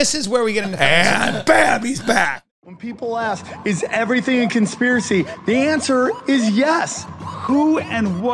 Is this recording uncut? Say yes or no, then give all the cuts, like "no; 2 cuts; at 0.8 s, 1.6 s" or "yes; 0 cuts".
no; 1 cut; at 2.4 s